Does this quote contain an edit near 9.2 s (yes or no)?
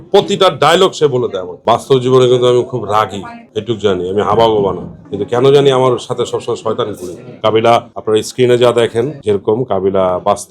no